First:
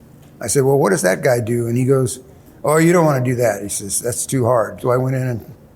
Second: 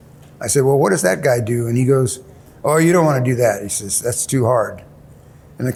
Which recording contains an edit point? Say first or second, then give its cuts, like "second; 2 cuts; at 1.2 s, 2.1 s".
first; 1 cut; at 4.8 s